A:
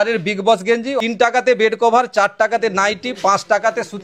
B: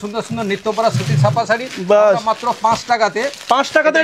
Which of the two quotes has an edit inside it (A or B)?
A